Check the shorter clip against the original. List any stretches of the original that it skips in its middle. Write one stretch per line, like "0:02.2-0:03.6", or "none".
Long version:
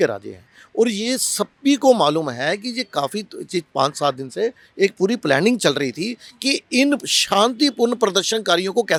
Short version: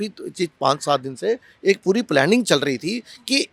none